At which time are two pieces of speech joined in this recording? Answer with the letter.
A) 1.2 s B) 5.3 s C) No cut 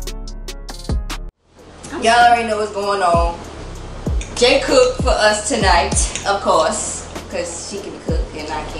A